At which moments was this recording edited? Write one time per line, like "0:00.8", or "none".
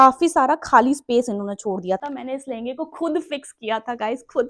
0:02.0